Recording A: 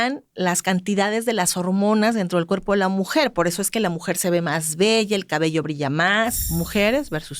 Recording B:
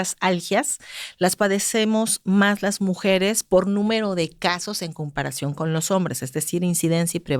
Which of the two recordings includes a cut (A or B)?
A